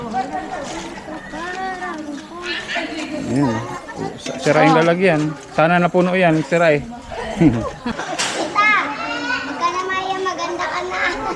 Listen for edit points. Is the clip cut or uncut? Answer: cut